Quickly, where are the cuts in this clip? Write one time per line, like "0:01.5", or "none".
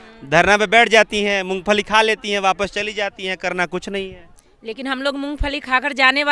none